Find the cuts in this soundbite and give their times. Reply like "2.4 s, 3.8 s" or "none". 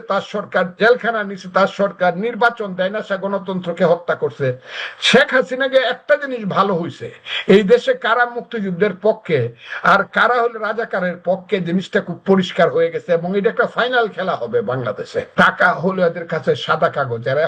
15.3 s